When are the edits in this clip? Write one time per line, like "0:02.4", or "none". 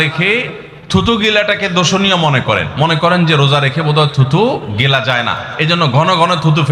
none